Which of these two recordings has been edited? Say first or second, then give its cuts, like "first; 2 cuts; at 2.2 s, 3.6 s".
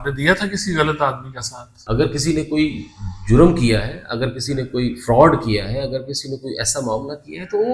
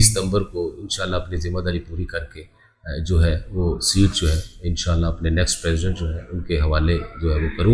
first; 1 cut; at 1.8 s